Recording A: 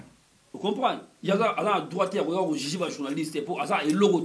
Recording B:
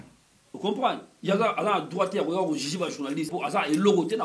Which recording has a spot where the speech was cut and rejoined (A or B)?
B